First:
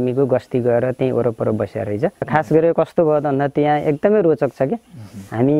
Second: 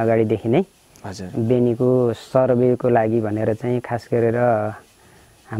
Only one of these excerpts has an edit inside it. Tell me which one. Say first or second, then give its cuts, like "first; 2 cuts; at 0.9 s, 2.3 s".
first; 1 cut; at 2.3 s